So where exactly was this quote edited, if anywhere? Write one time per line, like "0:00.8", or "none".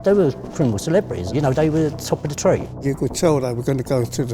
0:02.8